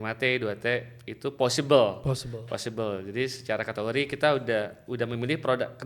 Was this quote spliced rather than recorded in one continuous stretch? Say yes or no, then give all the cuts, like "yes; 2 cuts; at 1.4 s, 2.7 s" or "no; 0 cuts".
no; 0 cuts